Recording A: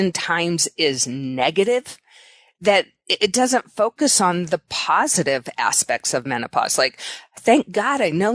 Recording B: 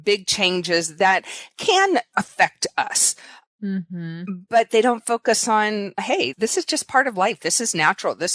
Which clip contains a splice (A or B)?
B